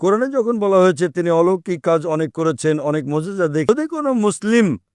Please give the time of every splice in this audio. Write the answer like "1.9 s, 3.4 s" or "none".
3.7 s

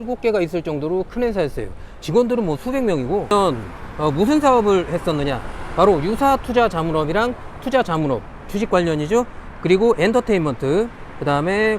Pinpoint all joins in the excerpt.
none

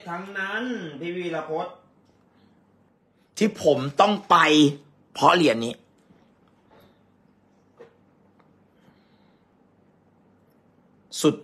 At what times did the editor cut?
2.9 s, 9.5 s

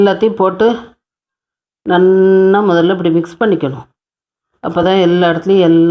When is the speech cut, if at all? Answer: none

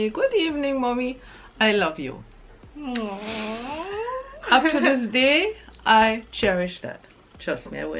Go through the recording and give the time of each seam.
none

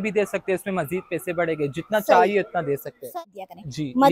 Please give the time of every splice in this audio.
3.2 s

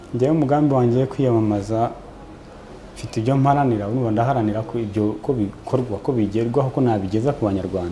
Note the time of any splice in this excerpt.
none

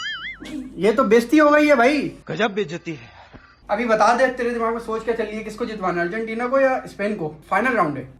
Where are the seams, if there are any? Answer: 3.6 s

